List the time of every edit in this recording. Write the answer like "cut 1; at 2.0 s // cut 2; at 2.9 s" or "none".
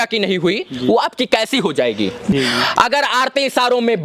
cut 1; at 2.3 s